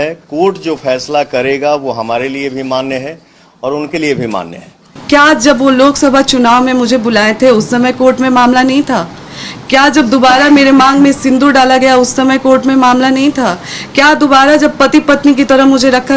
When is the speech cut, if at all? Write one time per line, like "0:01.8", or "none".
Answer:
0:05.0